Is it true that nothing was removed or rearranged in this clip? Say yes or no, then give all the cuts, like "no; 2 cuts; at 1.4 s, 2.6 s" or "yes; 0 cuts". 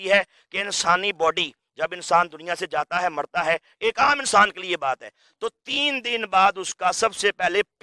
yes; 0 cuts